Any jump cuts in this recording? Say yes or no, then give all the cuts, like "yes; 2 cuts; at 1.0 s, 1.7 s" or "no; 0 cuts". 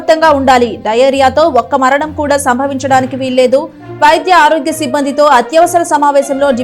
no; 0 cuts